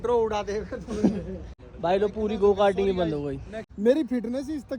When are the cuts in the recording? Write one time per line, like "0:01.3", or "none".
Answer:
0:01.5
0:03.6